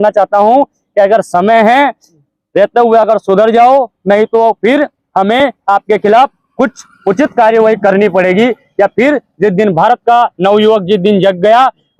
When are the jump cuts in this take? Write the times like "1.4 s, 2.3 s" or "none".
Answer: none